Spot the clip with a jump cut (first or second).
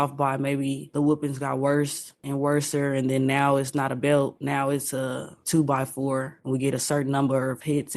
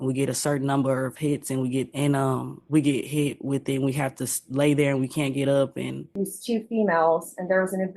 second